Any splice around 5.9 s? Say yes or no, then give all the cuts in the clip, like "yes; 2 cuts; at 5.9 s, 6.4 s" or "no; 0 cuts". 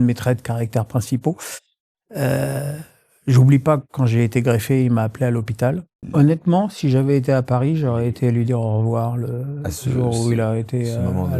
yes; 1 cut; at 5.9 s